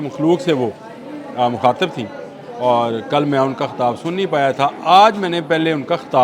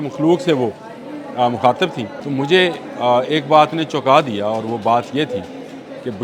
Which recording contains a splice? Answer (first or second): second